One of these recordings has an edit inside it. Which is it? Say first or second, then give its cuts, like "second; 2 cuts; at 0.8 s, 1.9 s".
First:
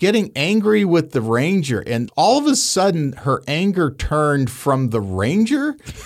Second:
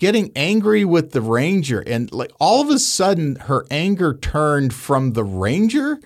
first; 1 cut; at 2.1 s